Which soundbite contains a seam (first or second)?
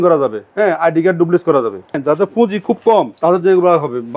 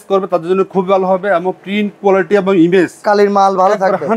first